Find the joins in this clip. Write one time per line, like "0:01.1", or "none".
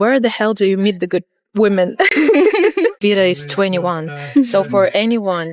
0:03.0